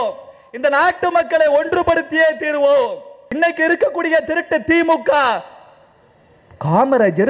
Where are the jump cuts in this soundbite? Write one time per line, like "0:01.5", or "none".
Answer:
0:03.2